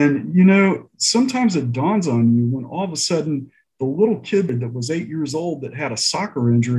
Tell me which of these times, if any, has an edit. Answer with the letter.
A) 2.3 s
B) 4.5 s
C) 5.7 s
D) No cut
B